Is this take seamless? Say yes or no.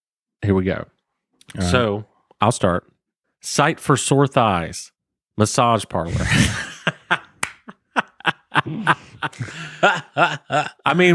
yes